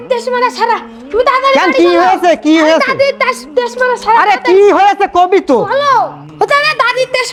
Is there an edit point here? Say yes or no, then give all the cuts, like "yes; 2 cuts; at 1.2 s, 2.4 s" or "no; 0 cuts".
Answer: no; 0 cuts